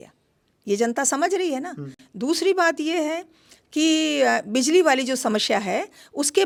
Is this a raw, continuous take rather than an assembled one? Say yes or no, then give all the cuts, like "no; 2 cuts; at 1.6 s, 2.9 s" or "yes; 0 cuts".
yes; 0 cuts